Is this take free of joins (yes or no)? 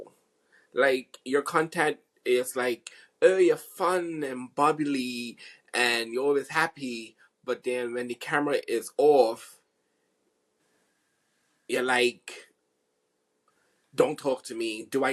yes